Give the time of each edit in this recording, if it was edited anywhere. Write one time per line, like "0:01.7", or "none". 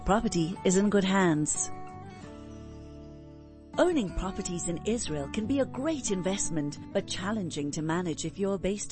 0:01.5
0:03.7